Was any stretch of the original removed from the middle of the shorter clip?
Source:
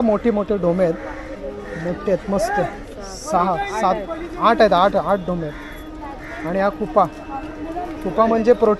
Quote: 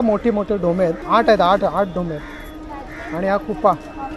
yes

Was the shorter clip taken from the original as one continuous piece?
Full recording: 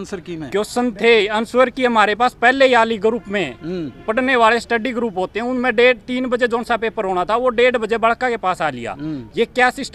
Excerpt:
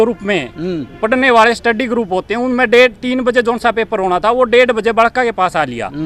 yes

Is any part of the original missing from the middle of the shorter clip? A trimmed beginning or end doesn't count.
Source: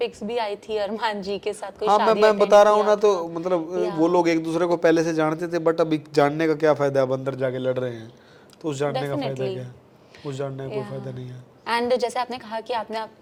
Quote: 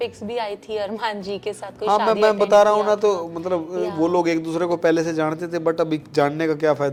no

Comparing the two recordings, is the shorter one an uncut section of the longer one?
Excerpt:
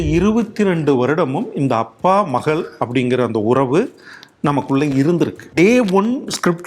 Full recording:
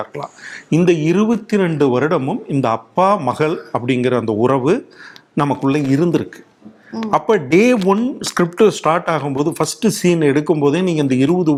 no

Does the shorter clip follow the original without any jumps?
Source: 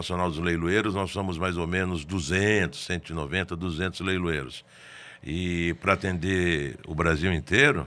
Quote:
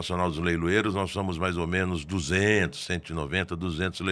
yes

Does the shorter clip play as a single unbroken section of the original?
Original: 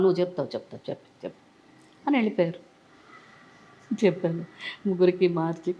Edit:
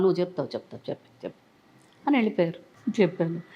no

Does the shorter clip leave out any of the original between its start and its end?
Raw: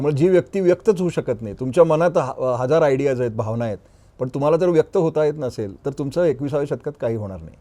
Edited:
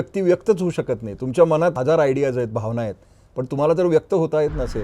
yes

